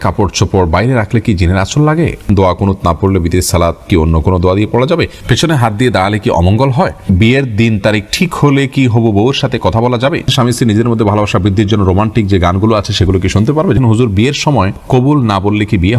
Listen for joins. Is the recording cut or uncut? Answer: cut